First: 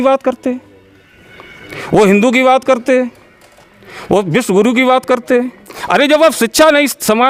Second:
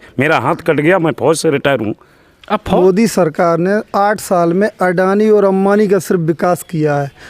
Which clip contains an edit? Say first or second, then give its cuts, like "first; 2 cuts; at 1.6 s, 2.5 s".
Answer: second; 1 cut; at 2.8 s